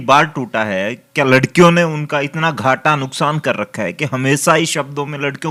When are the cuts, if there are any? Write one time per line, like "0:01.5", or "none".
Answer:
none